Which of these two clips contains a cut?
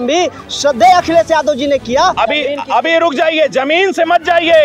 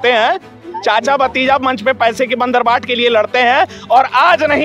first; 1 cut; at 2.2 s

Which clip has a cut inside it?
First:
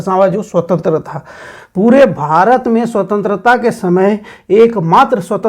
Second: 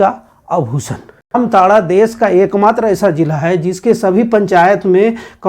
second; 1 cut; at 1.4 s

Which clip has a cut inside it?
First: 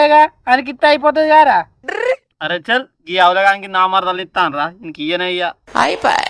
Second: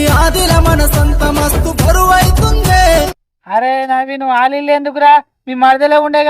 second; 1 cut; at 3.1 s

